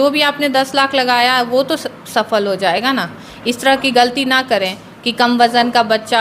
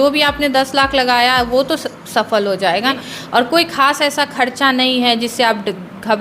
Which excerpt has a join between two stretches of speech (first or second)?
second